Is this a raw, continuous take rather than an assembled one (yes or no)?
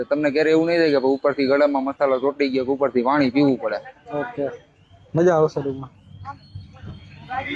yes